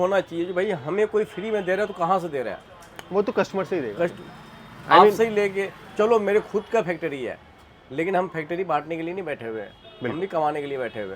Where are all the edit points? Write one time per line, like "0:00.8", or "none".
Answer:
none